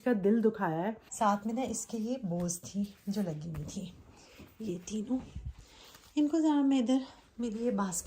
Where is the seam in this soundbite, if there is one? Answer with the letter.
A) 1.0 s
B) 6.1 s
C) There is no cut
A